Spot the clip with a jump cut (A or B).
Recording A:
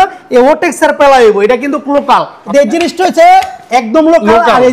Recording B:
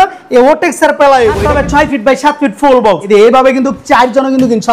B